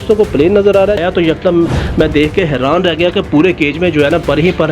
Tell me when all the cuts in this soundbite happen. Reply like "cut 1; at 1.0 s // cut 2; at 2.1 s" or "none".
cut 1; at 1.0 s